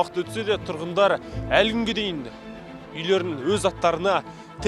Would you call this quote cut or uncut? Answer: uncut